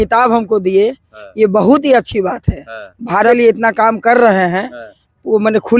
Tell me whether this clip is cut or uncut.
cut